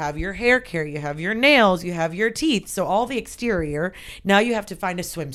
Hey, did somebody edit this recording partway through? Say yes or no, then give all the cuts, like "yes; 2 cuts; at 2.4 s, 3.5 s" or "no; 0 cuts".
no; 0 cuts